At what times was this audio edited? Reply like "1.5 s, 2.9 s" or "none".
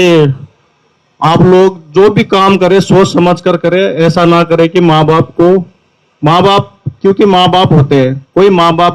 none